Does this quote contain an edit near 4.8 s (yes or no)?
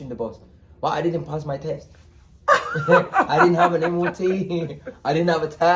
no